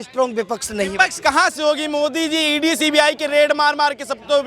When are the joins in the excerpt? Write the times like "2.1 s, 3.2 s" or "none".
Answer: none